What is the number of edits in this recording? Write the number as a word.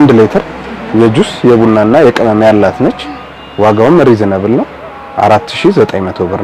zero